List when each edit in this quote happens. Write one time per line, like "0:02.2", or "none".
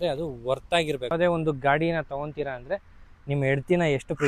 0:01.1